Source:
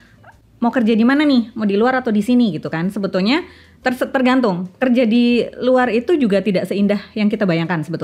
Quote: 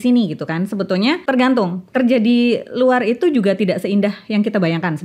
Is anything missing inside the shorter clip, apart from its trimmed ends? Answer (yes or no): yes